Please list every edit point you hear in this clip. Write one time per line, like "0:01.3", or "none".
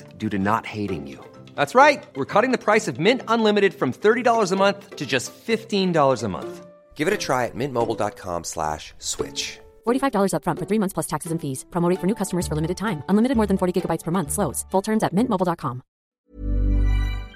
0:16.2